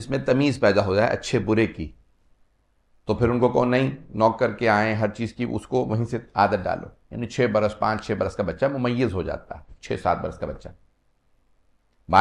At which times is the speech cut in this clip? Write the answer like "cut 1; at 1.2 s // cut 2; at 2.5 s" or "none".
none